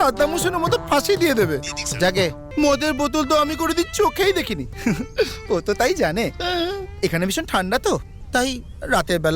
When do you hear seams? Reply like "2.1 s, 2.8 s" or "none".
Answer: 2.4 s